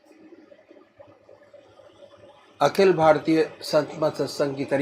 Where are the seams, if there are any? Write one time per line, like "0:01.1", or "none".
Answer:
0:03.2